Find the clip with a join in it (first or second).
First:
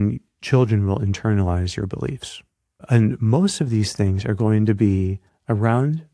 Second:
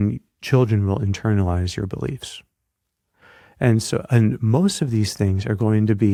first